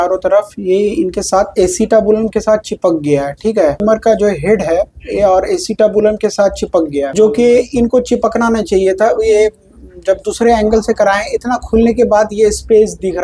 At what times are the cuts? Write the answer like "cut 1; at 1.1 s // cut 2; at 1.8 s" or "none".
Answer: cut 1; at 3.8 s // cut 2; at 7.1 s